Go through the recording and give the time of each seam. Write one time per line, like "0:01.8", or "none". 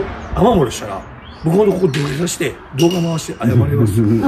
none